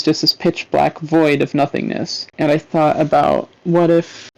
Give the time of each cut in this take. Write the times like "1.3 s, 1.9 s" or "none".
2.3 s